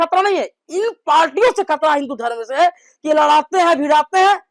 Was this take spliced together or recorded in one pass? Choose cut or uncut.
uncut